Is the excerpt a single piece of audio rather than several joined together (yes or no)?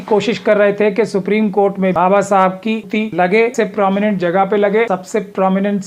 no